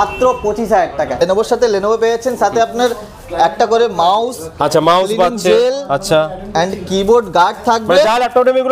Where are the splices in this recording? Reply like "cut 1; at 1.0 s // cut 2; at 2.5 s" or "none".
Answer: cut 1; at 1.2 s